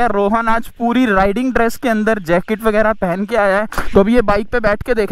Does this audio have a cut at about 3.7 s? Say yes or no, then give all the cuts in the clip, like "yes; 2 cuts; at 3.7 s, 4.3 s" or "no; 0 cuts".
yes; 1 cut; at 3.7 s